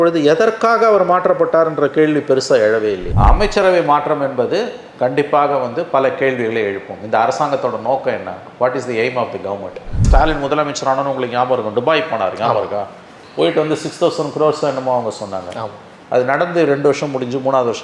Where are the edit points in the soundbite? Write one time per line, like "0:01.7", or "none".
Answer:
0:03.1
0:10.0